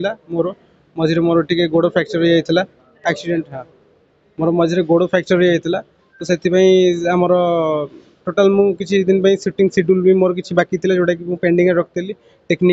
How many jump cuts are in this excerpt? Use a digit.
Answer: 0